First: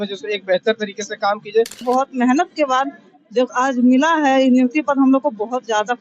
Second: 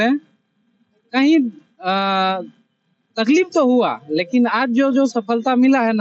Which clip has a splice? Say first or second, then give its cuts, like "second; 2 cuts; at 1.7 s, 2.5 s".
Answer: first; 1 cut; at 1.8 s